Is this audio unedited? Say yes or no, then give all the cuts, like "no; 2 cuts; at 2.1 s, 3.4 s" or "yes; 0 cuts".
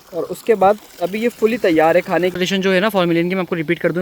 no; 1 cut; at 2.3 s